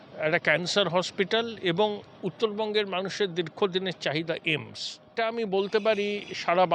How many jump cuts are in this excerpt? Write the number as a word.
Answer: one